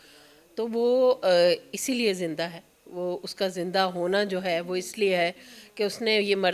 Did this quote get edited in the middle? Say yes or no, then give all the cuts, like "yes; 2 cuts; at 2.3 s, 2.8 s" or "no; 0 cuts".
no; 0 cuts